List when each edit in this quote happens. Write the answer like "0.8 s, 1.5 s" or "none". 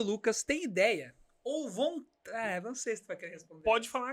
none

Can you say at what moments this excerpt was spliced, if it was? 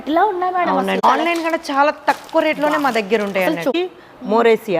1.0 s, 3.7 s

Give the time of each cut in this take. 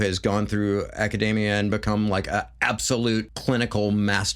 3.3 s

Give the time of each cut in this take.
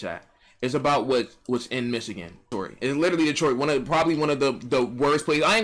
none

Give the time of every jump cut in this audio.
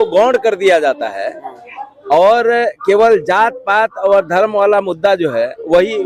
none

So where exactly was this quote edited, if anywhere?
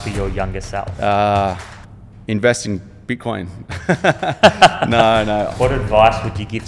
0.9 s, 5.5 s

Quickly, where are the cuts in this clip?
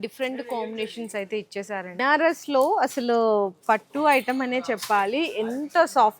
2.0 s

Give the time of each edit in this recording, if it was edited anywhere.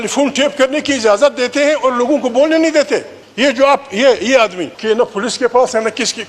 2.8 s, 4.7 s

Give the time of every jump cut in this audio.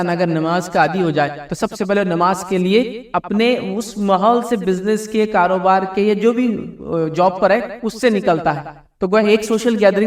none

